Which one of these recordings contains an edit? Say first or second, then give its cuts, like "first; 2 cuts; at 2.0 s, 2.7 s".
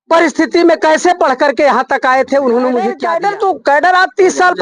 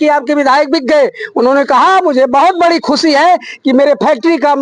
first; 1 cut; at 3.1 s